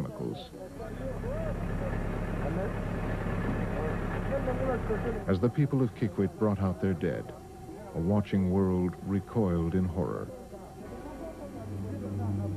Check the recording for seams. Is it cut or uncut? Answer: cut